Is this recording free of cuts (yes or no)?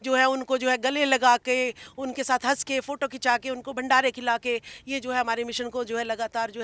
yes